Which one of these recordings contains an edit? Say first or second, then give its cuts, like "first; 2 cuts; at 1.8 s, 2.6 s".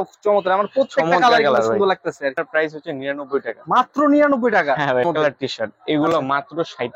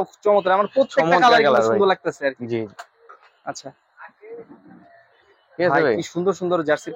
first; 2 cuts; at 2.3 s, 5.0 s